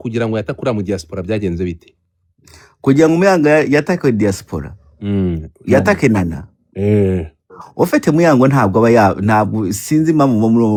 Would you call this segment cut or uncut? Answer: uncut